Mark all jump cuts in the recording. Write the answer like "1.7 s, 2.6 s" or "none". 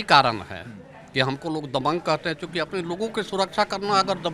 none